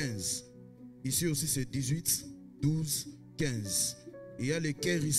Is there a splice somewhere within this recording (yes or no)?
no